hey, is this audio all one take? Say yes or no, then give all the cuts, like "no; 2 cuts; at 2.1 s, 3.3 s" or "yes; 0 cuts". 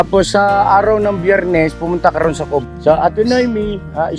no; 1 cut; at 2.6 s